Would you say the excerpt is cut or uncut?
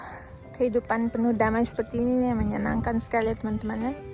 uncut